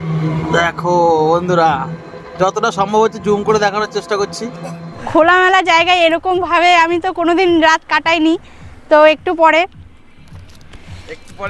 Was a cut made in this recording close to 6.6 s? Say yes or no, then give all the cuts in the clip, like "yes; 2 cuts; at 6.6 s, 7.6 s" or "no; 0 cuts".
no; 1 cut; at 4.4 s